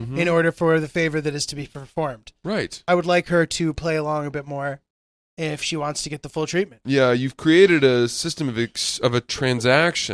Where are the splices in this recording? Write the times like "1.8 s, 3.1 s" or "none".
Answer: 2.9 s, 6.8 s